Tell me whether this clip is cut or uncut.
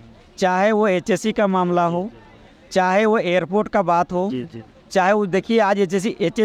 uncut